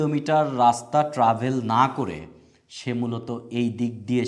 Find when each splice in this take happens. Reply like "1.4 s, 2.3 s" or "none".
none